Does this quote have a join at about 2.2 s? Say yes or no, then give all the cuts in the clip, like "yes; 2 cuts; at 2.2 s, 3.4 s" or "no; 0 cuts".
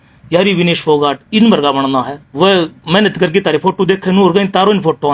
yes; 1 cut; at 2.2 s